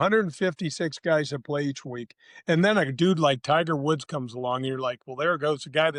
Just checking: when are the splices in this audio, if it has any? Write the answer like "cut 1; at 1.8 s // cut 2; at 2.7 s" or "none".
none